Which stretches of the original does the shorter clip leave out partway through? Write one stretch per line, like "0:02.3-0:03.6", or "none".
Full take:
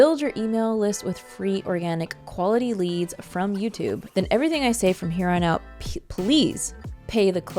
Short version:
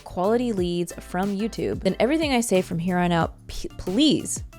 0:04.0-0:04.1